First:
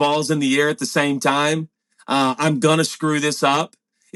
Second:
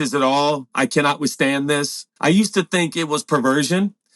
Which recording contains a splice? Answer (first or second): second